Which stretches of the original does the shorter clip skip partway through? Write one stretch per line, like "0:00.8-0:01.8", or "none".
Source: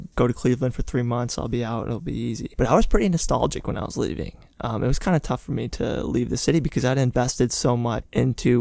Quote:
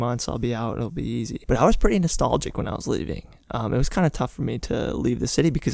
none